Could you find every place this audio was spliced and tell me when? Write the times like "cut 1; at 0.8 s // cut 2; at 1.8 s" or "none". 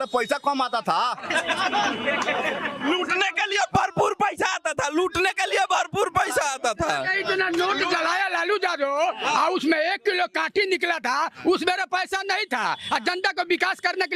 none